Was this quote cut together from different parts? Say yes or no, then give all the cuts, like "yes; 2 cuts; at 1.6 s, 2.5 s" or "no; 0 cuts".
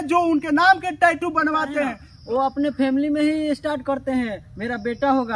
yes; 1 cut; at 2.1 s